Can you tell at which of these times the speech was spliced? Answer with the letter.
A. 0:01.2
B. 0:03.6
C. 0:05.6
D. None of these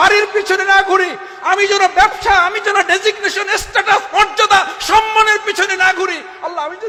D